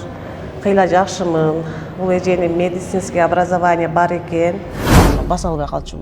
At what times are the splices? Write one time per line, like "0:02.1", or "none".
0:05.0